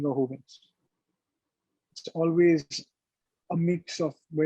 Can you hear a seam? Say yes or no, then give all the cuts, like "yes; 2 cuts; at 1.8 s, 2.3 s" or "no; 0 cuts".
no; 0 cuts